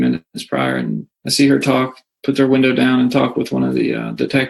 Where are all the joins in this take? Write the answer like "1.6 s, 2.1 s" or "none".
1.1 s